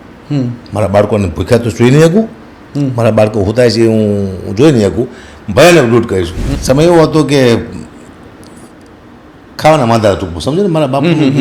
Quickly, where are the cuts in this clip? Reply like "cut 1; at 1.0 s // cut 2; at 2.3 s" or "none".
cut 1; at 6.4 s